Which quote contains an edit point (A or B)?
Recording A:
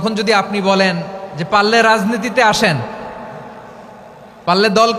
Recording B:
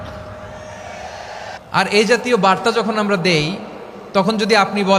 B